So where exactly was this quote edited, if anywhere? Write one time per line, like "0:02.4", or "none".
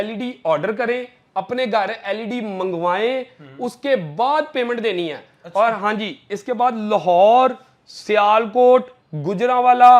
none